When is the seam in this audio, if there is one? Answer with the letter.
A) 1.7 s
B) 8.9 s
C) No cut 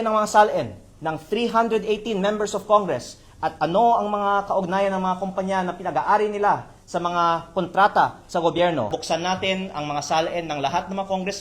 B